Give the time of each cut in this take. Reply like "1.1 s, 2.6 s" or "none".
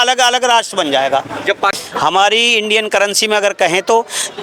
1.8 s